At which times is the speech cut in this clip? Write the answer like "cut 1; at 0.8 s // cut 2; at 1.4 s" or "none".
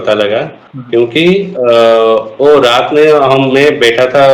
none